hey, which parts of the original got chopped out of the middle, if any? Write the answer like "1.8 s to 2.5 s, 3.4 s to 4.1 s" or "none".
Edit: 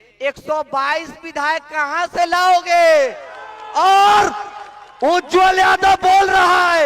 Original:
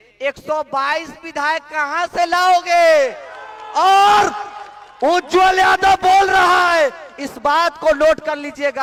none